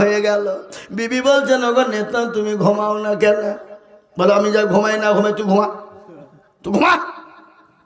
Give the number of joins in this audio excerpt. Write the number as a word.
zero